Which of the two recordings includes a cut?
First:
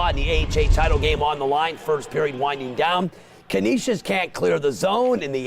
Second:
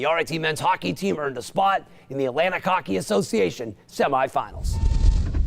first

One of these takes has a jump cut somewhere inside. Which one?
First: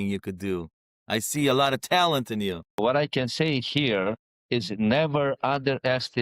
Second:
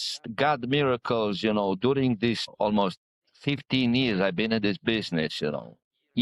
first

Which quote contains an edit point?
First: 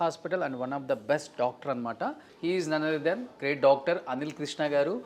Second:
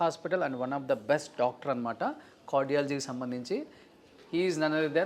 first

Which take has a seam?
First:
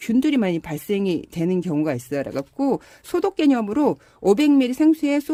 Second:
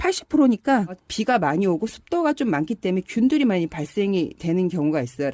second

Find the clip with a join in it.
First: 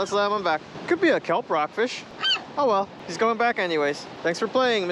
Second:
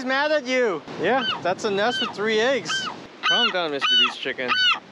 second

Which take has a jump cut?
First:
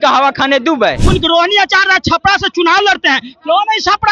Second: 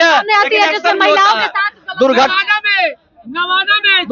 first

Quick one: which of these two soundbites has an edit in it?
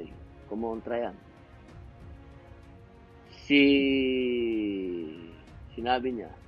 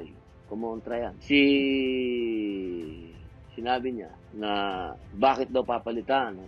second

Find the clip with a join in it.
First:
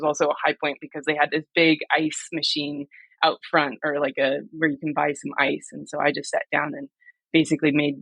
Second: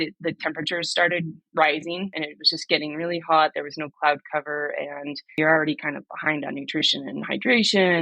second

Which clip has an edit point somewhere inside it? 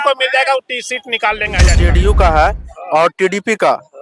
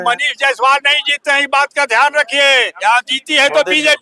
first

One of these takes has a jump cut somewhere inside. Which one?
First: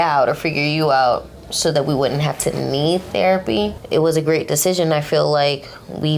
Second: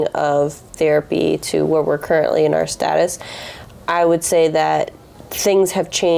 first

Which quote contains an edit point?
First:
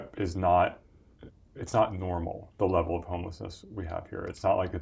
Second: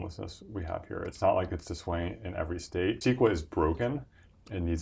second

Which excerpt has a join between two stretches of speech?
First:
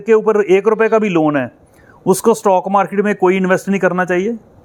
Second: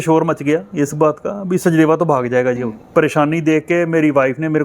second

